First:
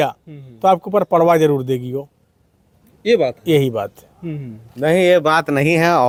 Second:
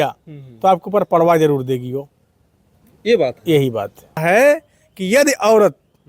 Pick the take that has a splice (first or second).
second